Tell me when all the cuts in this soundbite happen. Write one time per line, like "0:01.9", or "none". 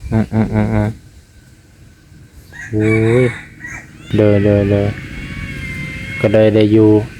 0:04.0